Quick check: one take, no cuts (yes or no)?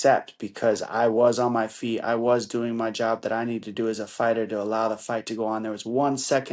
yes